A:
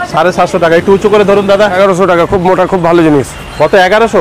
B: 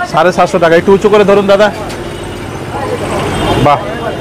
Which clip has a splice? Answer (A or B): A